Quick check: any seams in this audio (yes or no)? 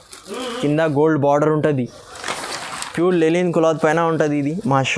no